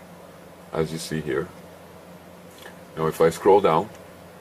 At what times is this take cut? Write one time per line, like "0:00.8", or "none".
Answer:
0:01.1